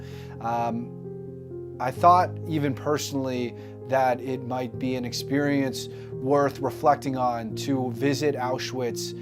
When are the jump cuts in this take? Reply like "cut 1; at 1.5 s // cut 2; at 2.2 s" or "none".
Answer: cut 1; at 3.1 s